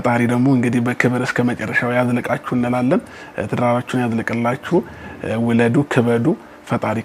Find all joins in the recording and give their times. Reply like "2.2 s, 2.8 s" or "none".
none